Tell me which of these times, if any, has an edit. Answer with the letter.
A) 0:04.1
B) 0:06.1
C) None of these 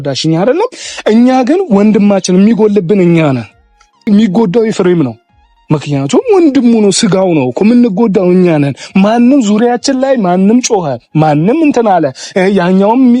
A